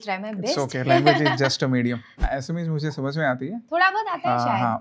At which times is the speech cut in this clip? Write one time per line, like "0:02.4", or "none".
0:02.2